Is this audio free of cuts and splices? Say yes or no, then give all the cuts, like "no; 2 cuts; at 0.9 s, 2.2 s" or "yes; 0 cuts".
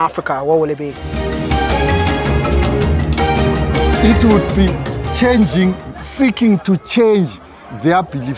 yes; 0 cuts